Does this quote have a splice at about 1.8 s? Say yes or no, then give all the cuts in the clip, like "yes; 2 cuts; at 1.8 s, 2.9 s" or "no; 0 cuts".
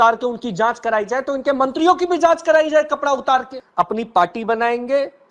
no; 1 cut; at 3.6 s